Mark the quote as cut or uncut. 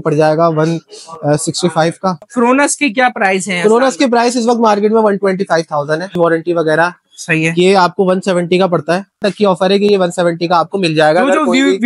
cut